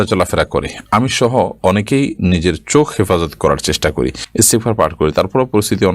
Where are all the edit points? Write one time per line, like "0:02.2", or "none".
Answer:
0:04.2